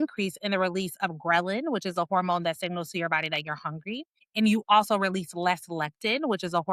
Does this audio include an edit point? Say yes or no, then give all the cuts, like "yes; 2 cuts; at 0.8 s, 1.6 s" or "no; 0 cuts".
yes; 1 cut; at 4.2 s